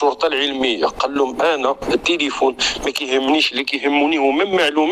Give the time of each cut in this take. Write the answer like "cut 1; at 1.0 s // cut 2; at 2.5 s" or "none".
none